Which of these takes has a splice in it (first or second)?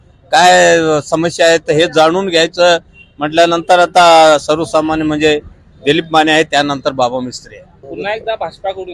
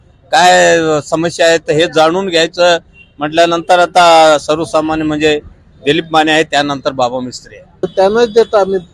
second